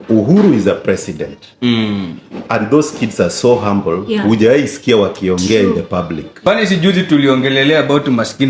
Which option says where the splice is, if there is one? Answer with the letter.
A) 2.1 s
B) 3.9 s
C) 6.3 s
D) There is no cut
C